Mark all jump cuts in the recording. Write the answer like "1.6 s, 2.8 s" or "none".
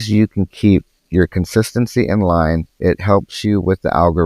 1.0 s, 2.7 s